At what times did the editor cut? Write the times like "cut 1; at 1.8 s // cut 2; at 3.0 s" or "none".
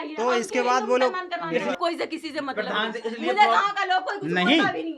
cut 1; at 1.8 s